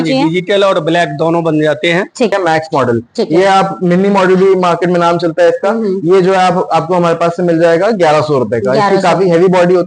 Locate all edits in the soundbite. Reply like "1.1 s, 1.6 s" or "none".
2.3 s